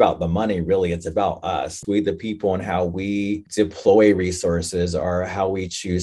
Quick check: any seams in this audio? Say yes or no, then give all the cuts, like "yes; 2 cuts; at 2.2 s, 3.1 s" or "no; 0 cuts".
yes; 2 cuts; at 1.8 s, 3.5 s